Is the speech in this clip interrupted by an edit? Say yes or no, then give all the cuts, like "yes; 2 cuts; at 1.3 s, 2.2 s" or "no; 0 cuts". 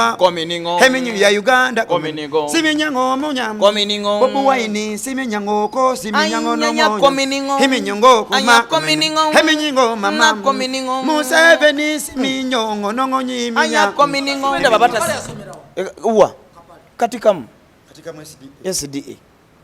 yes; 1 cut; at 14.6 s